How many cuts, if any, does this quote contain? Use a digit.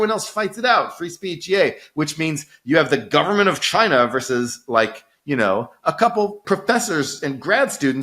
1